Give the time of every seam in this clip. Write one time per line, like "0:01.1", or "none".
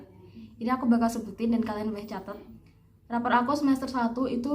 0:02.5

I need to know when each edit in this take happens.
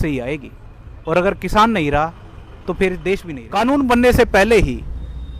0:03.4

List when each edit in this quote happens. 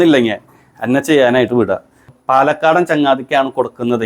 0:02.2

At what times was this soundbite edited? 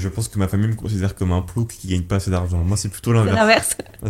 none

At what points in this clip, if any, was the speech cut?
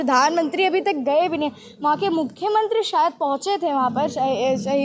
none

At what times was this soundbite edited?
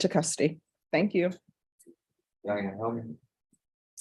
none

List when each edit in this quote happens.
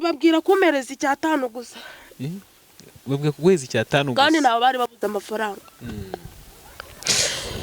none

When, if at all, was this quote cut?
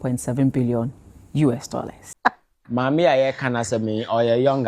0:02.1

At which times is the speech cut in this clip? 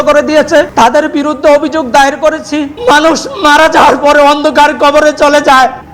0:02.7

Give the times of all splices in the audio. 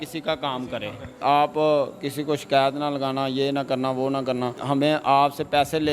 0:01.2
0:04.6

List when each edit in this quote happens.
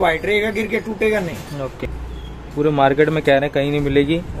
0:01.5

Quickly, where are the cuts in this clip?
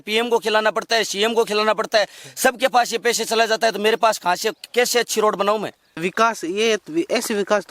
0:06.0

